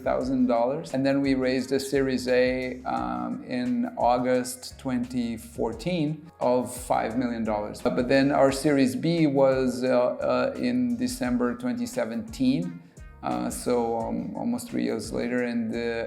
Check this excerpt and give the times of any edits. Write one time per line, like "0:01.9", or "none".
0:00.9
0:06.3
0:07.9